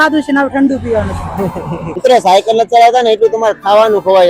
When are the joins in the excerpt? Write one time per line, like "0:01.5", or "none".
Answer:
0:01.9